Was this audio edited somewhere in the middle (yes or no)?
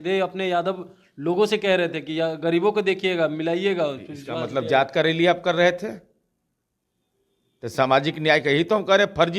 no